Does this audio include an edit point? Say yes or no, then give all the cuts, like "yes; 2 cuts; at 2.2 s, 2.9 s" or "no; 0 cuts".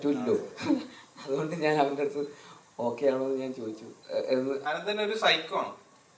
yes; 1 cut; at 4.6 s